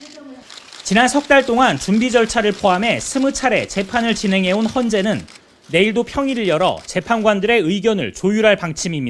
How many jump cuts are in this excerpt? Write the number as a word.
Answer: one